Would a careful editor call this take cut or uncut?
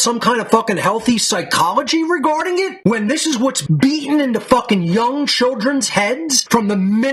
uncut